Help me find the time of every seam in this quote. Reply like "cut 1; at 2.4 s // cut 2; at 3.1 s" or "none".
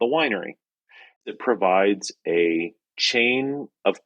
cut 1; at 1.2 s